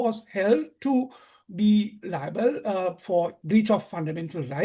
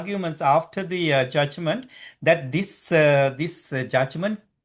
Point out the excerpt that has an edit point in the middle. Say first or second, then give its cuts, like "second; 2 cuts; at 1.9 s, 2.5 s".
first; 1 cut; at 3.4 s